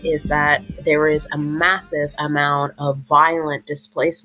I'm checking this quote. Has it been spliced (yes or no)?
no